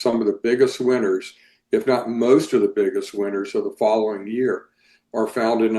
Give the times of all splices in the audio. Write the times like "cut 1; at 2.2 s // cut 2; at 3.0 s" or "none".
none